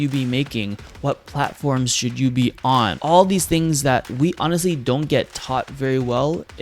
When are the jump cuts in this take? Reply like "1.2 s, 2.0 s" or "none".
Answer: 3.0 s, 4.1 s

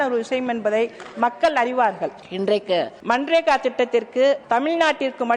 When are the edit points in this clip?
2.2 s, 2.9 s, 4.4 s

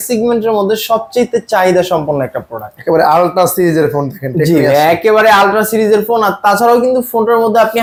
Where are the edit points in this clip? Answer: none

